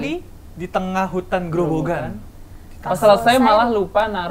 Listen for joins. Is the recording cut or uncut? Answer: uncut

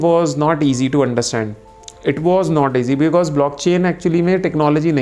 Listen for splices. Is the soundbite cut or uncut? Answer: uncut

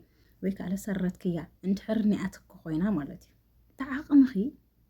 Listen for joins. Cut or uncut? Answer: cut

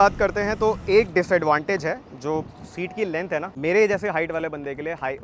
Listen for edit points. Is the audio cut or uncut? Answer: cut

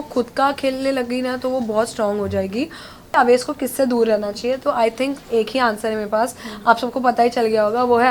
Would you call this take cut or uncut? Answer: cut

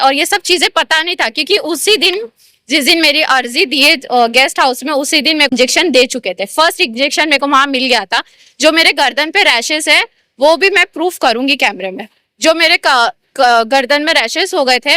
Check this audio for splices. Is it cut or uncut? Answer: cut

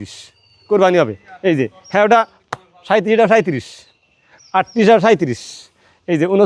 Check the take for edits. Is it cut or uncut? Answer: uncut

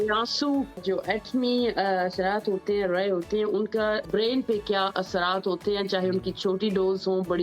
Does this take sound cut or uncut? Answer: cut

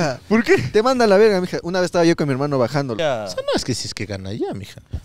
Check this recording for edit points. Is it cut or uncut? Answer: cut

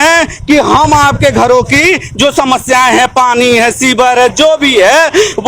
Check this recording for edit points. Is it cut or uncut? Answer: uncut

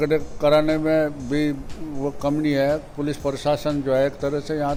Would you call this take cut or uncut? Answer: uncut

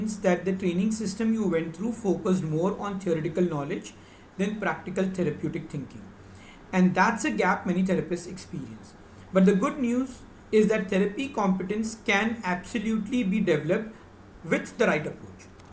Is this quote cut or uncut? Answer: uncut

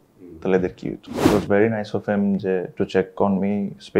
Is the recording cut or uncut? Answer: cut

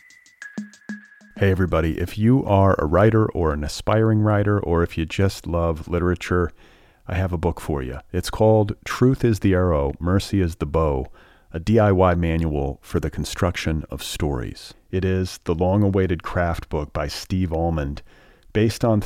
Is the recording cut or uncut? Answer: cut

